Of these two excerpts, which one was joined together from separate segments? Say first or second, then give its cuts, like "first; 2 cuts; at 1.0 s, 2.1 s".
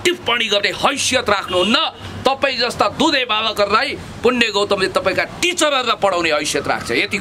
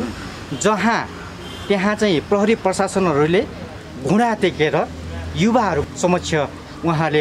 second; 2 cuts; at 3.9 s, 5.8 s